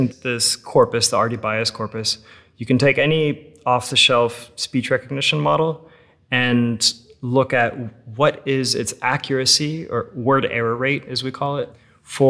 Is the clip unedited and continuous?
yes; 0 cuts

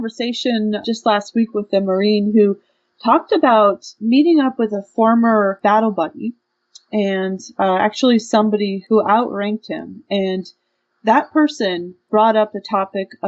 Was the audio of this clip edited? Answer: yes; 5 cuts; at 0.8 s, 3.9 s, 5.6 s, 8.8 s, 12.0 s

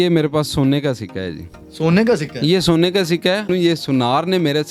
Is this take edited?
yes; 1 cut; at 3.5 s

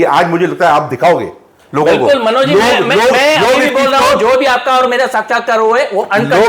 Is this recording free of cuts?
yes; 0 cuts

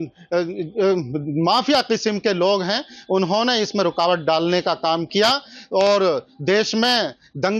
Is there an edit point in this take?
no; 0 cuts

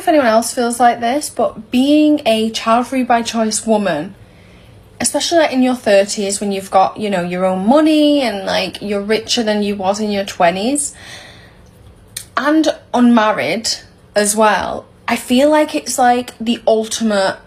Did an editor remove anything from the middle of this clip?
no; 0 cuts

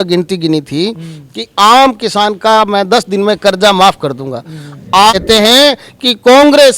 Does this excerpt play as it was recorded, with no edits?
no; 1 cut; at 5.1 s

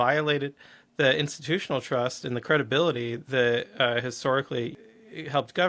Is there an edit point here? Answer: yes; 1 cut; at 4.8 s

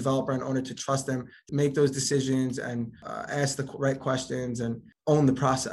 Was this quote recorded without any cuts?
no; 3 cuts; at 1.4 s, 3.1 s, 4.9 s

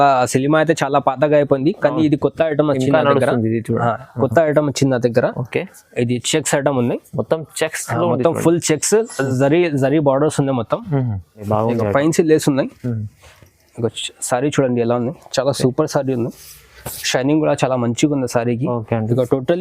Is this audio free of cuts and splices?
no; 1 cut; at 11.4 s

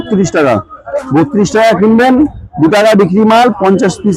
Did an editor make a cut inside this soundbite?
no; 0 cuts

